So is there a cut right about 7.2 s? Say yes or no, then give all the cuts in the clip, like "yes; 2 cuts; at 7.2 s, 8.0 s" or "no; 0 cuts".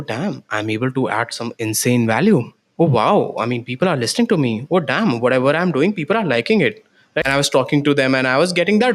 yes; 1 cut; at 7.2 s